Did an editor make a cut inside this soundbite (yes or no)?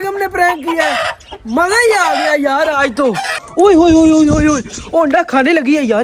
yes